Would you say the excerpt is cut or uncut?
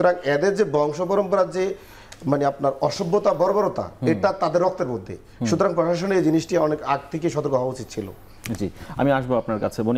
uncut